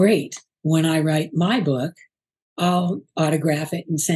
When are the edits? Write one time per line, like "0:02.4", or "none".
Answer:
none